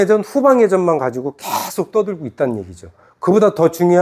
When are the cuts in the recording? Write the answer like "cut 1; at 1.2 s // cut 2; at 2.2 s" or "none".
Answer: none